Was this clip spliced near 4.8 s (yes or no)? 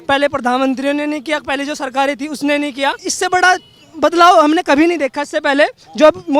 no